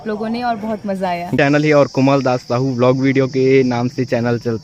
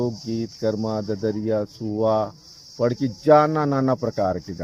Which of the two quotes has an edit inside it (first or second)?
first